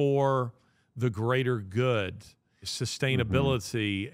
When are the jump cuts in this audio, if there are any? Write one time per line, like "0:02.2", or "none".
0:02.7